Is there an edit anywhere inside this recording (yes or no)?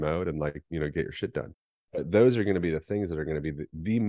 yes